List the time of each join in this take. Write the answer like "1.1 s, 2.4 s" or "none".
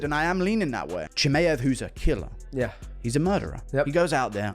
1.0 s